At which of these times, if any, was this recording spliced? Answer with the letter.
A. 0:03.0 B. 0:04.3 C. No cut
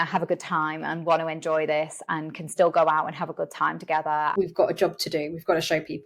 B